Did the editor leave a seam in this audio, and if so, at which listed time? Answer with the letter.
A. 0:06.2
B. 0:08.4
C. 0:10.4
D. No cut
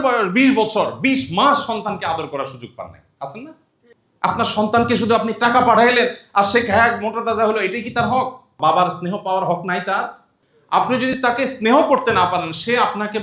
B